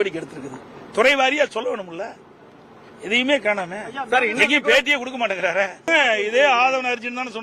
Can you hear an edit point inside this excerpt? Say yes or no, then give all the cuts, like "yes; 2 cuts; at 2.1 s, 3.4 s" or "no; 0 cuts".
yes; 1 cut; at 5.9 s